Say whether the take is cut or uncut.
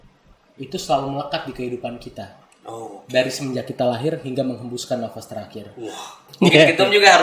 cut